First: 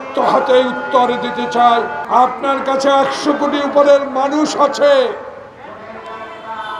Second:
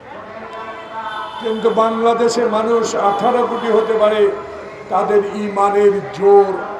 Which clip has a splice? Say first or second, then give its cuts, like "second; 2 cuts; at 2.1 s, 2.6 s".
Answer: first; 1 cut; at 2.0 s